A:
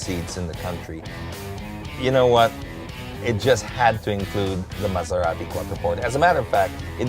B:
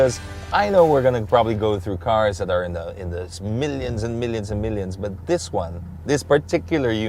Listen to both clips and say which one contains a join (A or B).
A